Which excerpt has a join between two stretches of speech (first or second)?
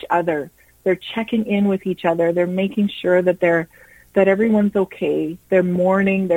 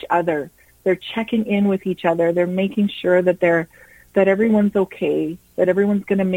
first